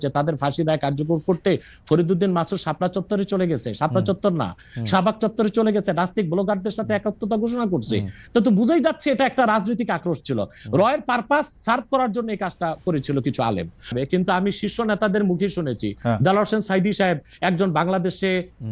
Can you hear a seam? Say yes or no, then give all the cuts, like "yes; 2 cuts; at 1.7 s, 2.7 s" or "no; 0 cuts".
yes; 1 cut; at 13.9 s